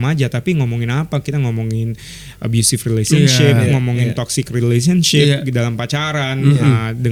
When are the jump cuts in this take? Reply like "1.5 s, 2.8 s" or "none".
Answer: none

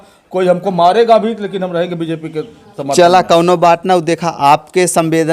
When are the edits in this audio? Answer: none

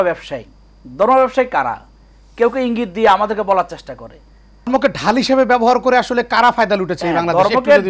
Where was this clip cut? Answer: 4.7 s

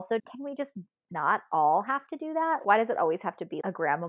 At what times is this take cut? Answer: none

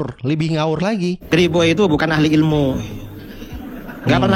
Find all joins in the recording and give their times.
1.2 s

